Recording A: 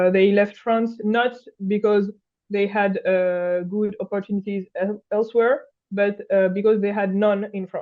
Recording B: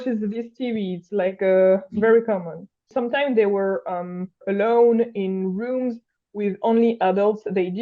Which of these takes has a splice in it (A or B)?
B